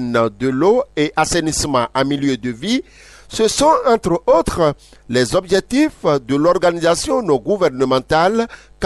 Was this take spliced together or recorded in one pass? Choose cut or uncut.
uncut